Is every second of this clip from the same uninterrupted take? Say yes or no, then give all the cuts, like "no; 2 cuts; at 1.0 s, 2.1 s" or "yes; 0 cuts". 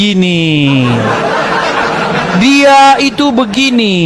yes; 0 cuts